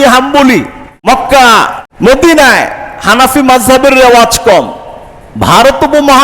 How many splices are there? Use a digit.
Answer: 2